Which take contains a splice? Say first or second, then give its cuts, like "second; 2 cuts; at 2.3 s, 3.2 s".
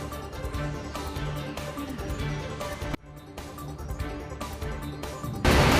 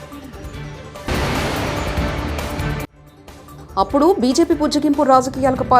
second; 2 cuts; at 1.1 s, 3.1 s